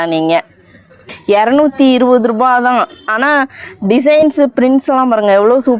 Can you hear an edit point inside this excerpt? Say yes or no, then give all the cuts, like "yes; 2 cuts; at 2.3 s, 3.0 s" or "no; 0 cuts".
yes; 1 cut; at 1.1 s